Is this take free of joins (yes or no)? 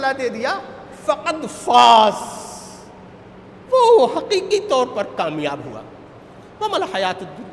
yes